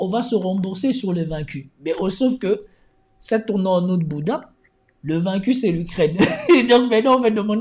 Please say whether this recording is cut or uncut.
uncut